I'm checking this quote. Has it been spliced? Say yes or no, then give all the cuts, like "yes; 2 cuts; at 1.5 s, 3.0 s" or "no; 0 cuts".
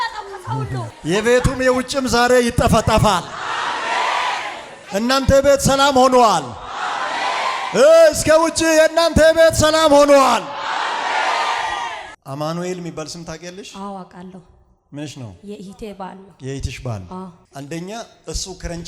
yes; 3 cuts; at 0.9 s, 12.1 s, 17.4 s